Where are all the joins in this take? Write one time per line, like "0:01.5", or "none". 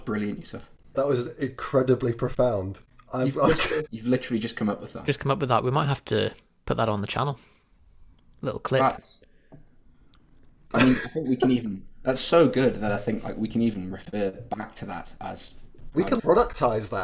0:00.9
0:03.9